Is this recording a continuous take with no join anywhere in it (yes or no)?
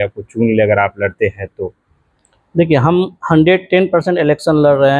yes